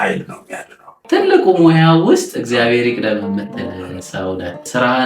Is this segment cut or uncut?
cut